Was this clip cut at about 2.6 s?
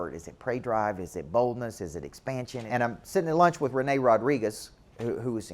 yes; 1 cut; at 2.6 s

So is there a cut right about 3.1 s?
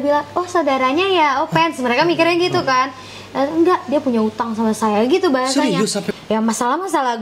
no; 1 cut; at 6.1 s

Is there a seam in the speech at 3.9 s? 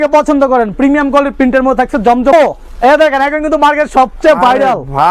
no; 1 cut; at 2.3 s

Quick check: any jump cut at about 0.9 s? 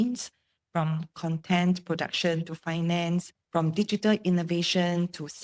no; 1 cut; at 3.4 s

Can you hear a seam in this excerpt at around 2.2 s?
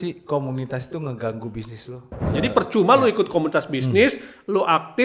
yes; 1 cut; at 2.2 s

